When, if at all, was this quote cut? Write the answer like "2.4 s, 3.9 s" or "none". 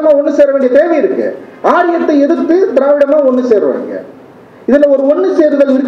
none